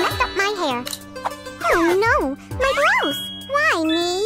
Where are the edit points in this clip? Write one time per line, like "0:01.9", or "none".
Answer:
0:01.5